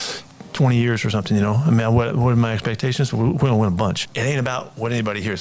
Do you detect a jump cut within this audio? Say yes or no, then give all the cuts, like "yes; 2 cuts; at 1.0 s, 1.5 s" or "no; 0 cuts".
yes; 1 cut; at 4.1 s